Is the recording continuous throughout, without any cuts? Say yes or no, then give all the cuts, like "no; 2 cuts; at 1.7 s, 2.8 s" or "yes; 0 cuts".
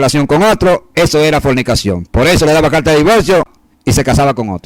no; 1 cut; at 3.5 s